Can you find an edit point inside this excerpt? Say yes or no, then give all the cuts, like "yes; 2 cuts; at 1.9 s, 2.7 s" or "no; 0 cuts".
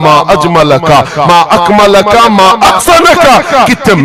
no; 0 cuts